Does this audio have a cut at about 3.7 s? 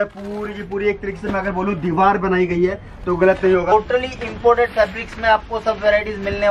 yes; 1 cut; at 3.7 s

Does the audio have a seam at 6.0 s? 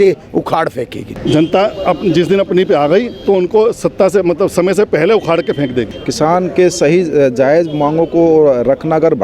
yes; 2 cuts; at 1.0 s, 6.0 s

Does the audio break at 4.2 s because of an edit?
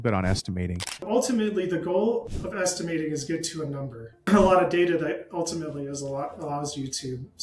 yes; 2 cuts; at 1.0 s, 4.2 s

